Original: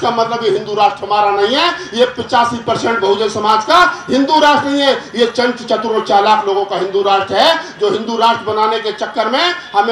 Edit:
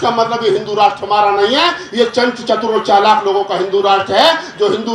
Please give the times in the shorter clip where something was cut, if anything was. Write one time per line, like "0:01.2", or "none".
0:01.9